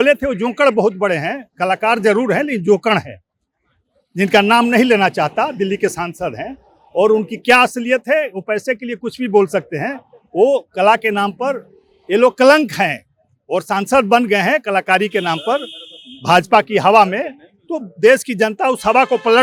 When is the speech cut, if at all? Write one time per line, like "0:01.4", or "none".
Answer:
none